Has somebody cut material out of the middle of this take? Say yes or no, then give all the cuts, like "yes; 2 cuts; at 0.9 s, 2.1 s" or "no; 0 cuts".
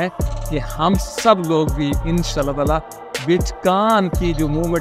no; 0 cuts